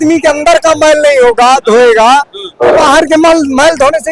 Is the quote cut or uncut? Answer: uncut